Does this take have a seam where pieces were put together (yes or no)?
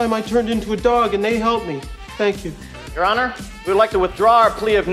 no